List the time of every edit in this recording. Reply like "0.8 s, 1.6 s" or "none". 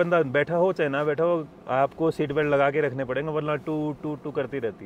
none